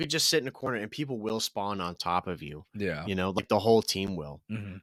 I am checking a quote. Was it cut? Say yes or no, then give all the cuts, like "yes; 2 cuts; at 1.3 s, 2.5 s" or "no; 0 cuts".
no; 0 cuts